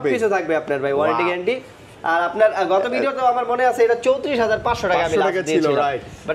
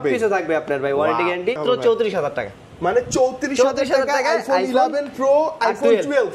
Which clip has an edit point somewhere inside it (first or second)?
second